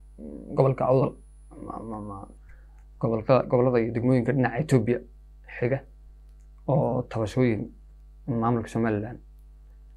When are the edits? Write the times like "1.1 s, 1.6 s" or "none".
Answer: none

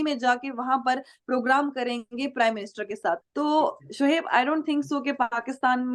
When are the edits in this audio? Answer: 3.2 s

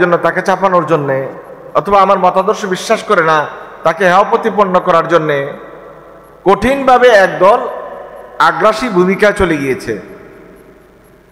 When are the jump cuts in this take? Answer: none

